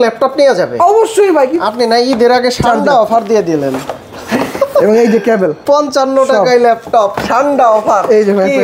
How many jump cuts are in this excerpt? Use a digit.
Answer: 2